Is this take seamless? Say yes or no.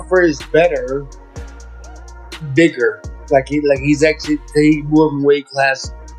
yes